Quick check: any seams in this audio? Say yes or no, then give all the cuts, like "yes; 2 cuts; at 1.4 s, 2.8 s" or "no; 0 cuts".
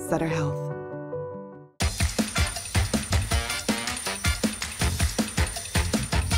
no; 0 cuts